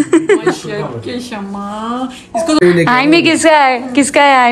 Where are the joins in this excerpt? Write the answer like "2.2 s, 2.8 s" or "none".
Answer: 2.6 s